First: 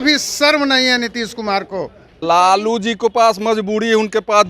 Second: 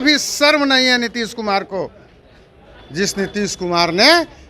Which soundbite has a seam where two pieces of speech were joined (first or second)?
first